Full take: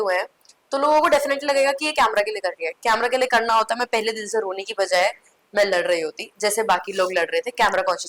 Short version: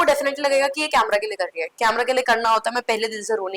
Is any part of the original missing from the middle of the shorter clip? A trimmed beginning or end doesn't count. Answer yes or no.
no